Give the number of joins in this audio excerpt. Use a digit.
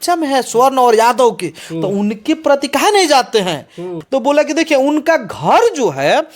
1